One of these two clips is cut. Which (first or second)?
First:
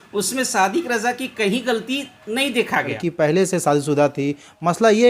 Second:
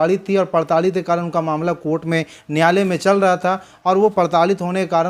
first